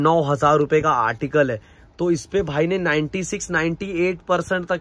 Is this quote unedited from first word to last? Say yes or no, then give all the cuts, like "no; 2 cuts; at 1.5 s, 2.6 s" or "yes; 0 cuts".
yes; 0 cuts